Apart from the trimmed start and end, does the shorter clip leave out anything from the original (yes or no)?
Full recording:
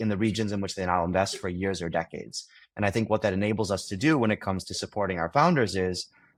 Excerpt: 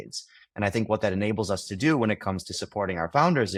no